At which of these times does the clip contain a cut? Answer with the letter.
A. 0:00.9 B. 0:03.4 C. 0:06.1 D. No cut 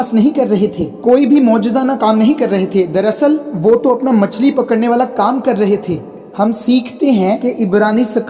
D